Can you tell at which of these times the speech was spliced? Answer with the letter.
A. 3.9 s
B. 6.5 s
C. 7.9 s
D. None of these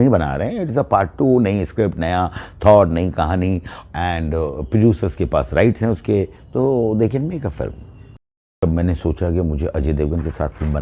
C